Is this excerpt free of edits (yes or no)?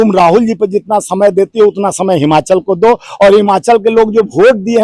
yes